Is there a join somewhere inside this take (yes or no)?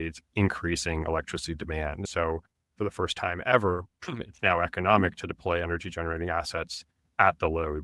yes